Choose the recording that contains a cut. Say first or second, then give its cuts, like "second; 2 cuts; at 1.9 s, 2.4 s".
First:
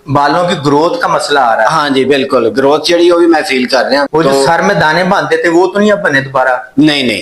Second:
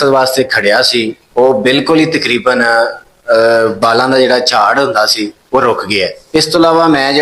first; 1 cut; at 4.1 s